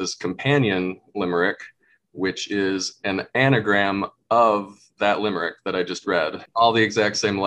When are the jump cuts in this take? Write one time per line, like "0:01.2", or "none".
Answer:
0:06.4